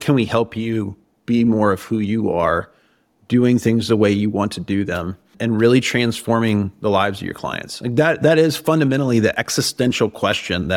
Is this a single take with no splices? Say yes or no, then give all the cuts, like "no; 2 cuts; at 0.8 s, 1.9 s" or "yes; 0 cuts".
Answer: no; 1 cut; at 5.3 s